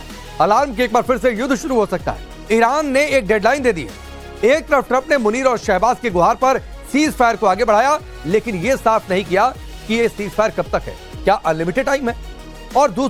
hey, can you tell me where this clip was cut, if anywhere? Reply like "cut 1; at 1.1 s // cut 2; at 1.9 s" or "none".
none